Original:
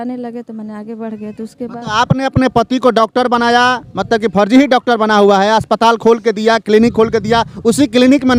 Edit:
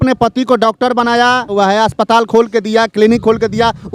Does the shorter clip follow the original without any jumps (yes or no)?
no